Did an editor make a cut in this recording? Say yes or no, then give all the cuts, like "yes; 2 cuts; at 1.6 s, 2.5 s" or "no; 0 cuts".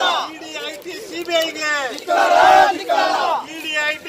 no; 0 cuts